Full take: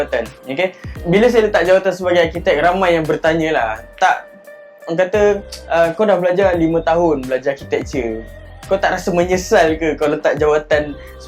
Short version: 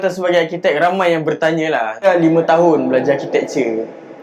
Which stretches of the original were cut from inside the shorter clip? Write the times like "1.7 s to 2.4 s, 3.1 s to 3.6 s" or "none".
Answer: 3.9 s to 6.4 s